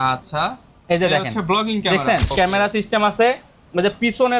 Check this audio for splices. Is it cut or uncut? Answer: cut